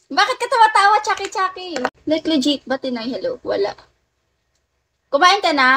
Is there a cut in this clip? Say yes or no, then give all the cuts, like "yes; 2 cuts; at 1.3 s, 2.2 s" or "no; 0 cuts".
no; 0 cuts